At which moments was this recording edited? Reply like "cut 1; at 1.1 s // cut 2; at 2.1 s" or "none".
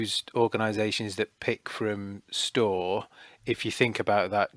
none